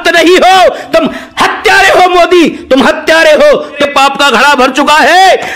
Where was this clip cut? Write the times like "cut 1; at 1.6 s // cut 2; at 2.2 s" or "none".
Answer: cut 1; at 3.7 s